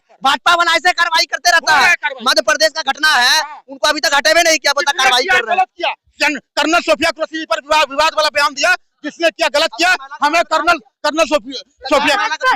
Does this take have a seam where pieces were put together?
no; 0 cuts

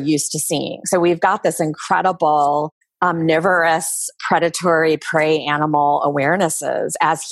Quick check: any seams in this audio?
yes; 1 cut; at 2.8 s

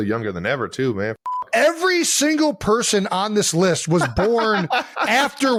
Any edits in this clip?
no; 0 cuts

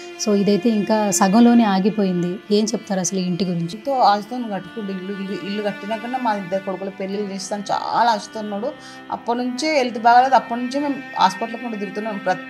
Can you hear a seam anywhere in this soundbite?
yes; 1 cut; at 3.8 s

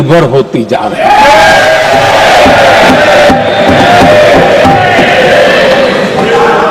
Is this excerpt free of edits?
yes; 0 cuts

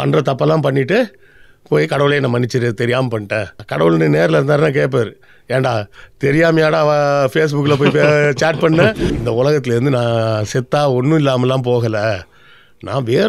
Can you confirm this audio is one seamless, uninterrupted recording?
no; 2 cuts; at 3.6 s, 9.1 s

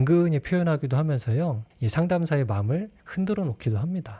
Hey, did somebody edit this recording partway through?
no; 0 cuts

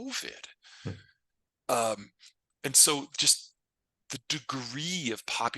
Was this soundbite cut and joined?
no; 0 cuts

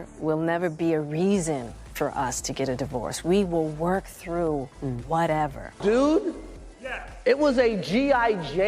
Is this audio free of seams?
no; 1 cut; at 5.7 s

